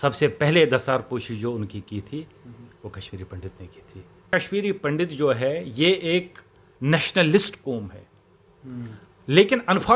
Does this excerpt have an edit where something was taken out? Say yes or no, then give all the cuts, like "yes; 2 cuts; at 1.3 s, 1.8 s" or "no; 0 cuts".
yes; 1 cut; at 4.3 s